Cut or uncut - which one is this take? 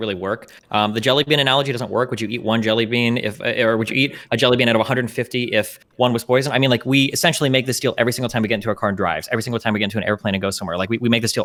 uncut